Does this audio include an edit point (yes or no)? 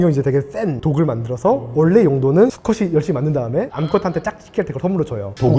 no